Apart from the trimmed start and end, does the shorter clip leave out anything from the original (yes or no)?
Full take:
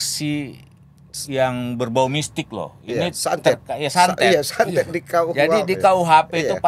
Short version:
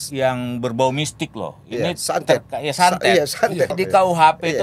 yes